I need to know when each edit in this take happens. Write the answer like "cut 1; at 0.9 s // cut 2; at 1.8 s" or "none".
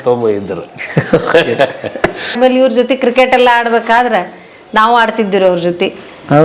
cut 1; at 2.3 s